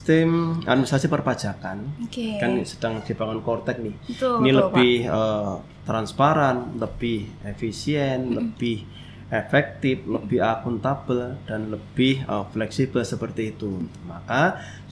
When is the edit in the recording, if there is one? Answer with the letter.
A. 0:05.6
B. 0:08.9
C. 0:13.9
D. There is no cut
D